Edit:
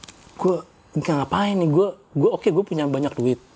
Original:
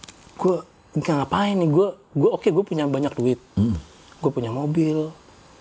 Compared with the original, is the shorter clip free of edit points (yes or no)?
yes